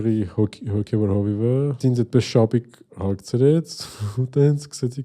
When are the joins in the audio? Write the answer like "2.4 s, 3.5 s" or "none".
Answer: 1.8 s